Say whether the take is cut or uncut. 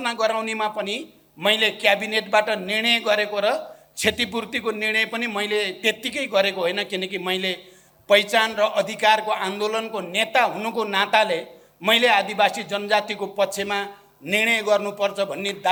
uncut